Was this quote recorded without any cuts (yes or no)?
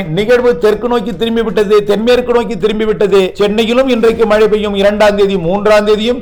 yes